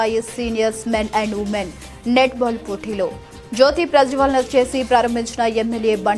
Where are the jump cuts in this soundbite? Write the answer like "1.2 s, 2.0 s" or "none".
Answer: none